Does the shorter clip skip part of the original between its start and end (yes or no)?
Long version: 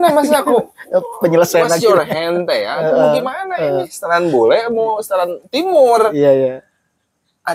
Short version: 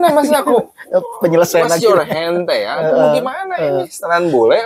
no